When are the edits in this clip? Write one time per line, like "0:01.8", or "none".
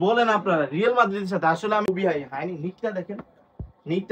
0:01.8